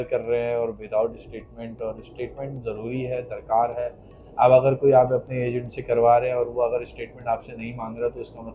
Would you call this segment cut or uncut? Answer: uncut